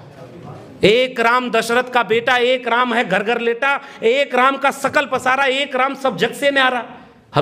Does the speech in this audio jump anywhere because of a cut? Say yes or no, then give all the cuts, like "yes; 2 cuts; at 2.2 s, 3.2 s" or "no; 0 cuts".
no; 0 cuts